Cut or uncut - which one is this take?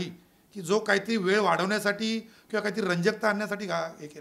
uncut